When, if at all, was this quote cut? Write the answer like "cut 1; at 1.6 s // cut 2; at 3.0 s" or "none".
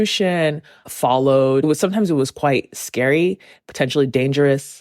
cut 1; at 1.6 s